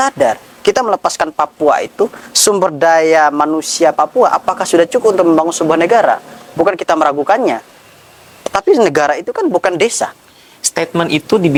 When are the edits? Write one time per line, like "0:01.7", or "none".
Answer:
none